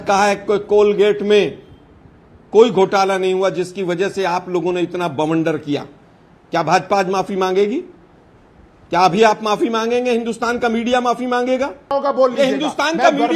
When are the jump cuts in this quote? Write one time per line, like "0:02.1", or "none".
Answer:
0:11.8